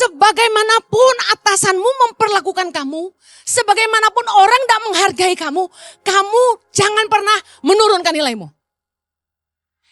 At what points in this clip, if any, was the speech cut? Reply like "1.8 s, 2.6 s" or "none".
none